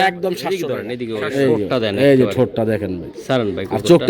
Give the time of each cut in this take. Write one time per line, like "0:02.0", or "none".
0:00.9